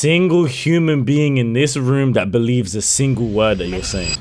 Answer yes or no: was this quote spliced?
no